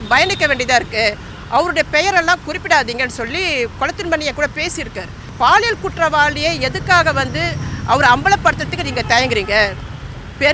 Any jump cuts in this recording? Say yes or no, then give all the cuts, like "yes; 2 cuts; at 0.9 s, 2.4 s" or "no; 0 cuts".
yes; 1 cut; at 5.3 s